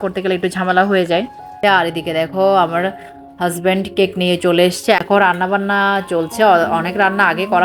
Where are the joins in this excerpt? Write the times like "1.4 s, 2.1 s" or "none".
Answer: 1.5 s, 5.0 s